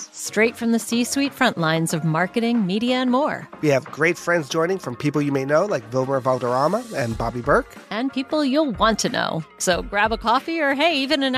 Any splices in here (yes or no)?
no